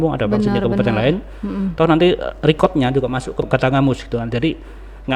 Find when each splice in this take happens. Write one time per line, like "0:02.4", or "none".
0:03.4